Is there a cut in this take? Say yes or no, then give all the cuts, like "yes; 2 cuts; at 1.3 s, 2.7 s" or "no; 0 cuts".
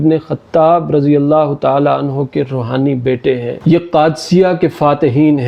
no; 0 cuts